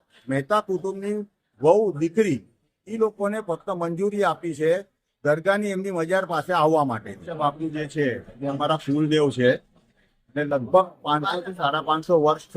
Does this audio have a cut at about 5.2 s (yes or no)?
no